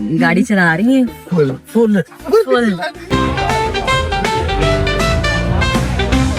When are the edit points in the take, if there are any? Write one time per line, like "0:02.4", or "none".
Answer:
0:03.1